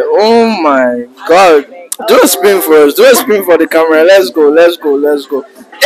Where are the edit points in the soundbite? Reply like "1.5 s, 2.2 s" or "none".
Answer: none